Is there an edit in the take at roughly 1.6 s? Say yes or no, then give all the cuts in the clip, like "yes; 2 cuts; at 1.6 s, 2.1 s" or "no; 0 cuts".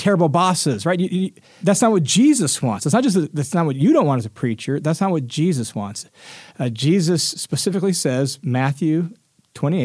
yes; 1 cut; at 1.6 s